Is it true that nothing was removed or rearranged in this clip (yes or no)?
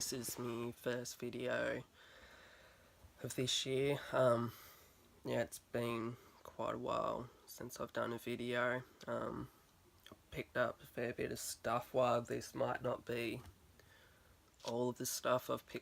yes